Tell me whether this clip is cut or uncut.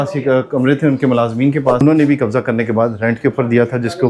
cut